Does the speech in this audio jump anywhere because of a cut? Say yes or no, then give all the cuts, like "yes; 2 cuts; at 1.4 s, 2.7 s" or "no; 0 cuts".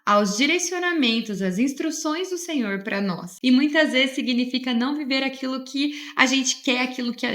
yes; 1 cut; at 3.3 s